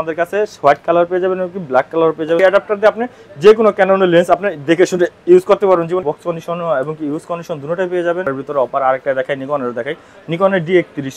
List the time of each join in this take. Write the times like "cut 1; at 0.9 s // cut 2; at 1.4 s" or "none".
cut 1; at 2.4 s // cut 2; at 6.0 s // cut 3; at 8.3 s